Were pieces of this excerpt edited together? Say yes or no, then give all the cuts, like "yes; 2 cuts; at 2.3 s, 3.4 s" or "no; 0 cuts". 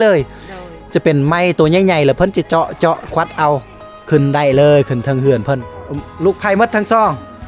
yes; 1 cut; at 5.7 s